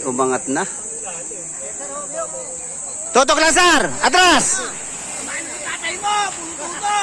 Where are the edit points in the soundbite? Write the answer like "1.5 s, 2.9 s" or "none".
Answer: none